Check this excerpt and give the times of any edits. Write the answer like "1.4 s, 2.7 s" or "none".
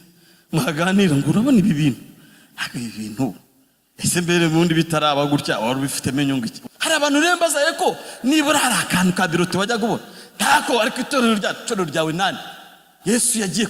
6.6 s

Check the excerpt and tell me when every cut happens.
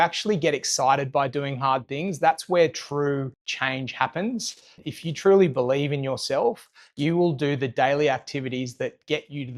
3.4 s, 4.8 s

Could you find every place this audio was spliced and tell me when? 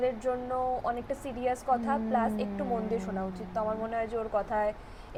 none

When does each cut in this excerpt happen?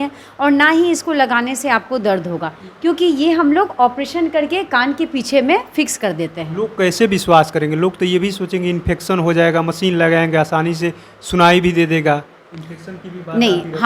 none

